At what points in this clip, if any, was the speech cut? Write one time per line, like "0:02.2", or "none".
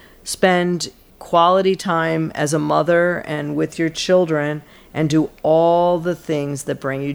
none